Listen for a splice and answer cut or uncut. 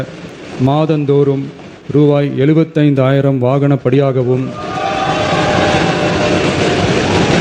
uncut